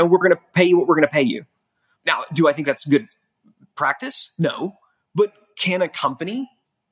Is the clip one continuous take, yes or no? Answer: yes